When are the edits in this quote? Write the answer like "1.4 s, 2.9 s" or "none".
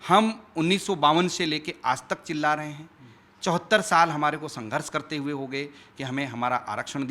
none